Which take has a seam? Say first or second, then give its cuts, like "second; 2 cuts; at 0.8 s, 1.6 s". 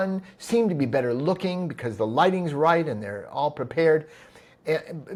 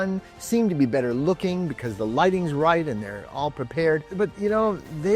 second; 1 cut; at 4.1 s